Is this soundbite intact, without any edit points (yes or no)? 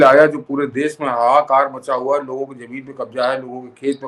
yes